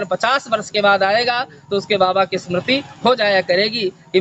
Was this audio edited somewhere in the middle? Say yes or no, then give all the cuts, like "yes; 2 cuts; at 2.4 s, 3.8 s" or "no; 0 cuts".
no; 0 cuts